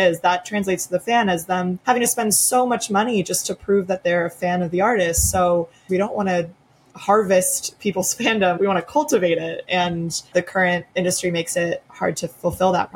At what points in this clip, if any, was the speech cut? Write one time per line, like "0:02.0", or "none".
0:01.8
0:05.8
0:10.6
0:11.9